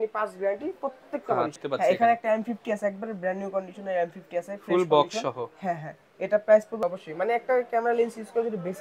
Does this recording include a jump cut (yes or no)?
yes